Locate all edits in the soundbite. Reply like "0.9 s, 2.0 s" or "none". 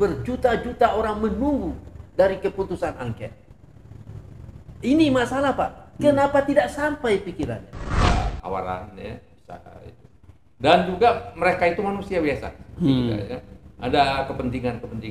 8.1 s